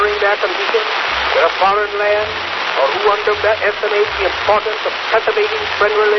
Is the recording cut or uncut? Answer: uncut